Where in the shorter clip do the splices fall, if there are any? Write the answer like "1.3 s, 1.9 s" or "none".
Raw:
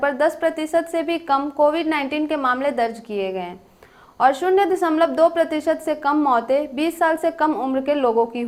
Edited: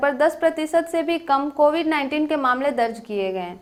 none